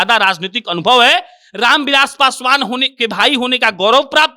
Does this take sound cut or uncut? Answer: uncut